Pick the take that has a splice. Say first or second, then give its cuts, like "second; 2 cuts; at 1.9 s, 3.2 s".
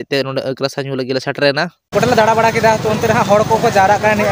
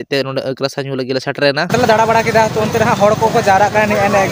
second; 1 cut; at 1.7 s